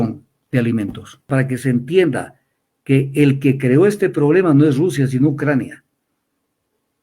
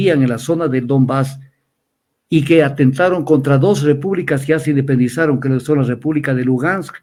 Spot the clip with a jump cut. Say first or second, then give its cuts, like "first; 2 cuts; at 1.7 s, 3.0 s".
first; 1 cut; at 1.3 s